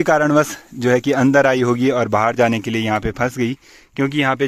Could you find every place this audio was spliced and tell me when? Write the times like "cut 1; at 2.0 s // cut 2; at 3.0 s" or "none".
none